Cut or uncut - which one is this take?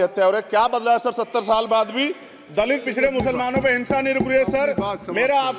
uncut